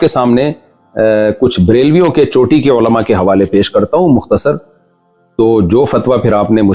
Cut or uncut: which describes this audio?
uncut